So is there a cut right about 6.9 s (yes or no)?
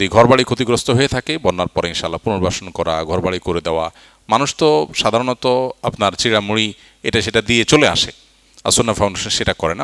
no